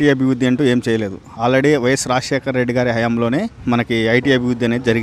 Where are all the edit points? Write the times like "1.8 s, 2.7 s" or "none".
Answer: 3.5 s